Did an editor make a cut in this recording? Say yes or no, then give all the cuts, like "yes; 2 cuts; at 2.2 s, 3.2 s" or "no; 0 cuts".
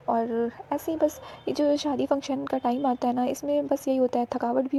no; 0 cuts